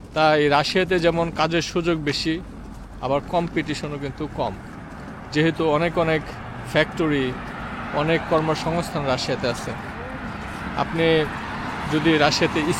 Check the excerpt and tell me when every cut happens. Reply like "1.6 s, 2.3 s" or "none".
none